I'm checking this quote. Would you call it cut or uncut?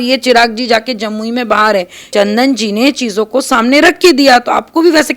cut